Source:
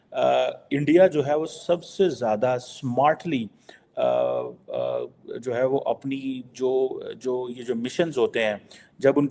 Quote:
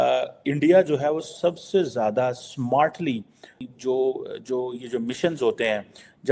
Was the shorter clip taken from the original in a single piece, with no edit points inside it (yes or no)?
no